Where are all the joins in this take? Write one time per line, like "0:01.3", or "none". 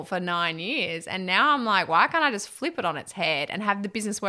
none